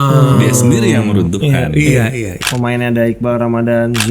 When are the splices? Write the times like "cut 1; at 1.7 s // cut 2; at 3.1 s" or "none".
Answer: cut 1; at 2.3 s